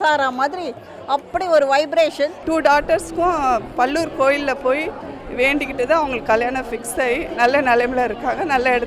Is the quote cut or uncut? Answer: cut